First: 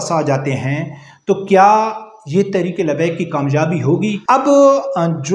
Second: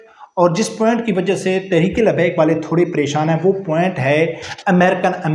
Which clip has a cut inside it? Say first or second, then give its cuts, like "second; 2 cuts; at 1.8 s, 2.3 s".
first; 1 cut; at 4.2 s